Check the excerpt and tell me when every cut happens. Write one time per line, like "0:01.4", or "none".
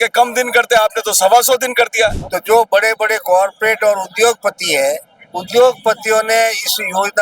0:02.3